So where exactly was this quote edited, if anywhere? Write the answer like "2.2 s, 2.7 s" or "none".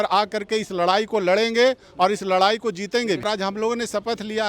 3.2 s